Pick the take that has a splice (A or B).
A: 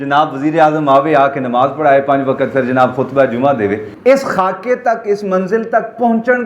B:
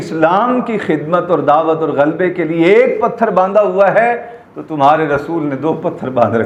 A